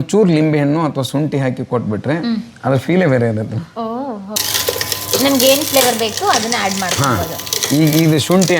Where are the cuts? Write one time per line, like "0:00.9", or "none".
0:04.4